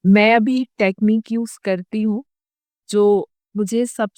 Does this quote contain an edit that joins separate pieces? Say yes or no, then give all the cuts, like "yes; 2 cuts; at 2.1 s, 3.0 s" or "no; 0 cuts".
no; 0 cuts